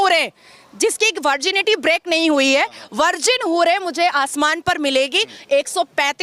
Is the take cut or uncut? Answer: uncut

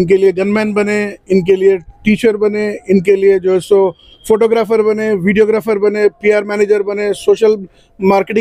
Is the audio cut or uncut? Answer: uncut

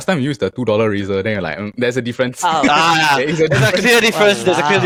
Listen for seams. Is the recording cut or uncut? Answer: uncut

